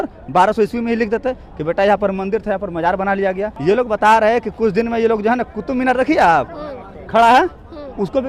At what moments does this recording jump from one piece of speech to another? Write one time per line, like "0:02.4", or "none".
0:03.5